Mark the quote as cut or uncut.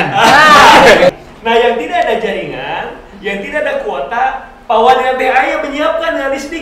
cut